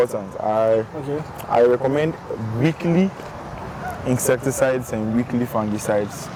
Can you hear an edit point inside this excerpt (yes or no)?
no